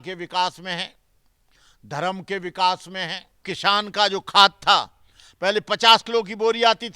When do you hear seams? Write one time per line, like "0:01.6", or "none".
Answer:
0:03.4